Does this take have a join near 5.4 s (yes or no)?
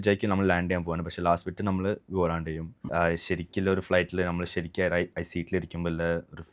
no